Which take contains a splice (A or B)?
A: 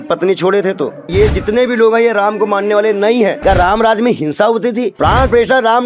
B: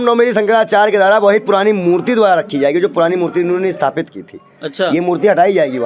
A